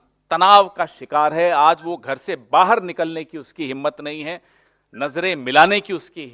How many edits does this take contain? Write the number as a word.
zero